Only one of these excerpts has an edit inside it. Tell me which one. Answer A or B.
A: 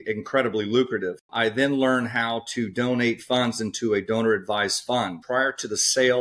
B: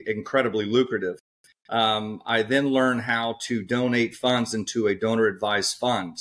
A